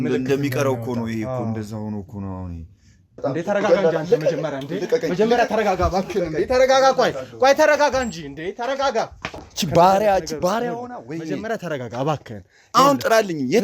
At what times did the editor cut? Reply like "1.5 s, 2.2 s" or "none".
3.2 s, 9.5 s